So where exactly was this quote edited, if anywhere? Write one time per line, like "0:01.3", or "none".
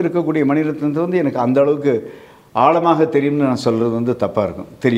none